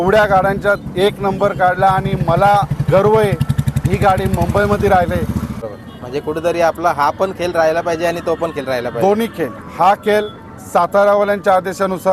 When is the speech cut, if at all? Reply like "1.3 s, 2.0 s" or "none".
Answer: 5.6 s